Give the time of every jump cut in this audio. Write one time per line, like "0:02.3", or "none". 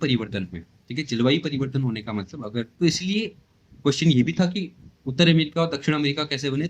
0:02.7